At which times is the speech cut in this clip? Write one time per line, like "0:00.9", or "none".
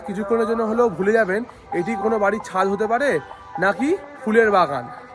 none